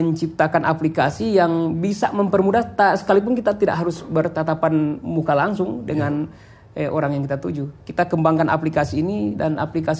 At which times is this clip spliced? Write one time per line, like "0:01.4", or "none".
none